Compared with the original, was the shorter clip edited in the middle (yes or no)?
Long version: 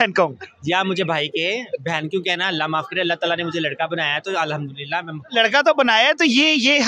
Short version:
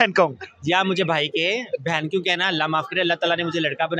no